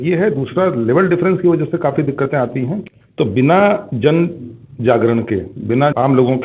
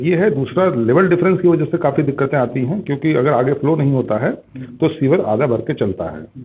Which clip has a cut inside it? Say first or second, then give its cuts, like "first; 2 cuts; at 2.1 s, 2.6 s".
first; 1 cut; at 2.8 s